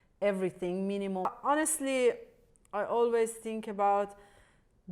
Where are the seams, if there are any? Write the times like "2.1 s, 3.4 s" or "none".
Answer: 1.3 s